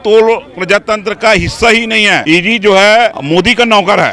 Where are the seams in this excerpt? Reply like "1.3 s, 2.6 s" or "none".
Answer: 2.2 s, 3.2 s